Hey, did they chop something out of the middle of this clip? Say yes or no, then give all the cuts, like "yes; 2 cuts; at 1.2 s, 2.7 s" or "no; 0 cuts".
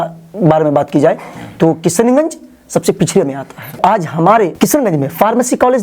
yes; 1 cut; at 3.8 s